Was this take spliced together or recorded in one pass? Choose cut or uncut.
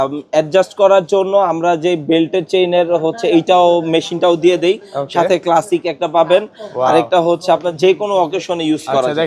uncut